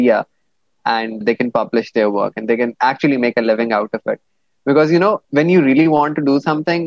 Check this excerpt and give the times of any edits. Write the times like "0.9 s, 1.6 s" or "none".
1.2 s, 5.2 s